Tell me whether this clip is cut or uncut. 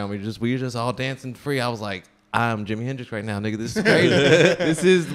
uncut